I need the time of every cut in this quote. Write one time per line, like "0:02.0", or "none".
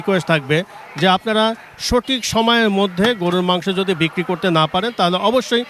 none